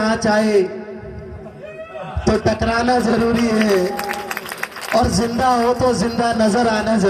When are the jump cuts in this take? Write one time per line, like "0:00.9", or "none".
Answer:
none